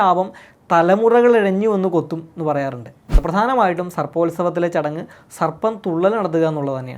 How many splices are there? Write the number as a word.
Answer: one